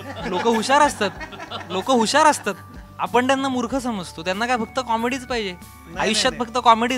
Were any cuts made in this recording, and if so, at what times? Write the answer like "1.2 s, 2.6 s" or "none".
none